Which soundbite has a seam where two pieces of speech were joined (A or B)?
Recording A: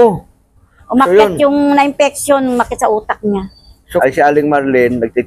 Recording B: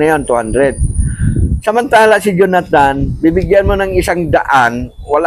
A